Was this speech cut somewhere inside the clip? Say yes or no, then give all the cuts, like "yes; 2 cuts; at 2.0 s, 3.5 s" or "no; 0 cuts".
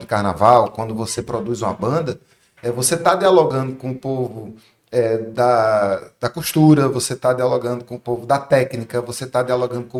no; 0 cuts